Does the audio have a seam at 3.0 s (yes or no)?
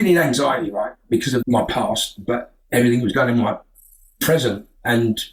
no